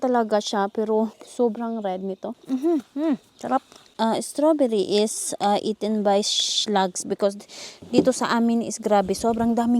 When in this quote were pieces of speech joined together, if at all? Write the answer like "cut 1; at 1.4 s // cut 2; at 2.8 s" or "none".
cut 1; at 1.2 s // cut 2; at 2.4 s // cut 3; at 3.8 s

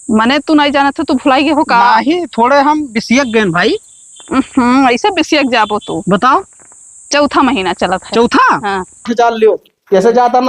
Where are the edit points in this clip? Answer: cut 1; at 9.1 s

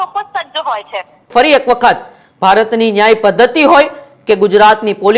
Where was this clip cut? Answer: cut 1; at 1.3 s

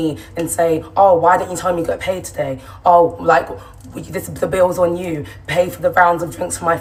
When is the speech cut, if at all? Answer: none

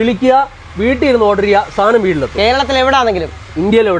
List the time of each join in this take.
none

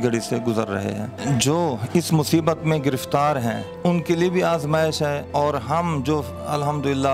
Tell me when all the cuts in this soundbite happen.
cut 1; at 1.1 s // cut 2; at 3.7 s // cut 3; at 5.2 s

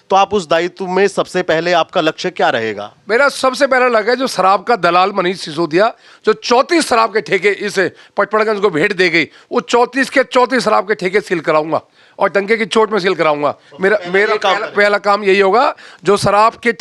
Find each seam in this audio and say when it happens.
none

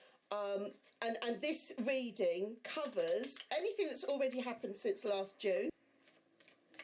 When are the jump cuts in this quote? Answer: cut 1; at 5.9 s

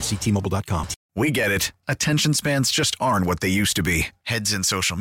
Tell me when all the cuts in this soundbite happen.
cut 1; at 1.0 s

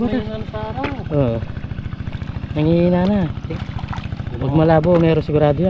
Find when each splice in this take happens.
cut 1; at 3.4 s

